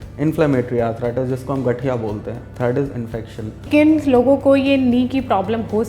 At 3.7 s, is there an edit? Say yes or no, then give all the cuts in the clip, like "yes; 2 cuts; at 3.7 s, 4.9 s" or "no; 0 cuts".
yes; 2 cuts; at 2.4 s, 3.7 s